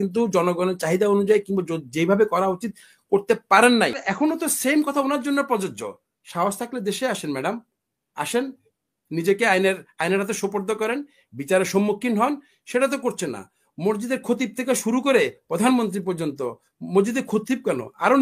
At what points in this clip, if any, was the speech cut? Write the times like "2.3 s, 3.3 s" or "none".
4.0 s